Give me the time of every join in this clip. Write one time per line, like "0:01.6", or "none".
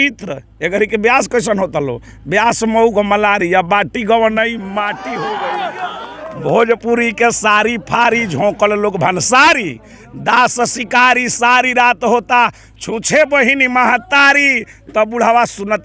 0:05.1